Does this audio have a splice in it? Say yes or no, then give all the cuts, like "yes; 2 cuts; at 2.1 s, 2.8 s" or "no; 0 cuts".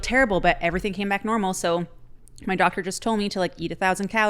no; 0 cuts